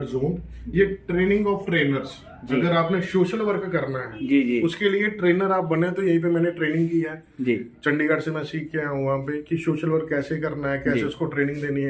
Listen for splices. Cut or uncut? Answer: uncut